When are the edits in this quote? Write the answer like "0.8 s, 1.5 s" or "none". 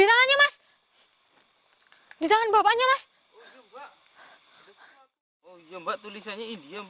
5.7 s